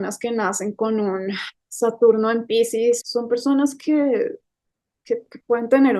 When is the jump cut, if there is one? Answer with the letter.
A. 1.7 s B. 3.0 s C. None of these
B